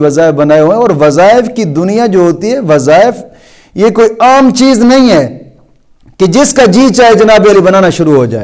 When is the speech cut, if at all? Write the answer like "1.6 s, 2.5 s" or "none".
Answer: none